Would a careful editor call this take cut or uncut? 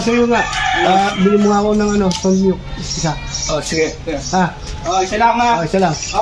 uncut